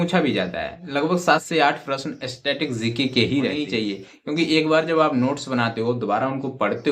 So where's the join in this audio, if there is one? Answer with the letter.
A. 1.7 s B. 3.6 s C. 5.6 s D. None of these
B